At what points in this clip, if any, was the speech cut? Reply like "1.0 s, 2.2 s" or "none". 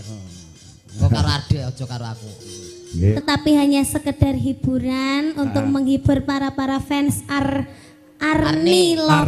3.0 s